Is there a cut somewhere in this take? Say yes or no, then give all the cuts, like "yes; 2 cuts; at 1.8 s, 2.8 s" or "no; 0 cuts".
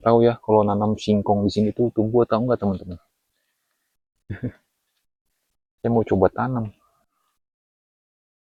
no; 0 cuts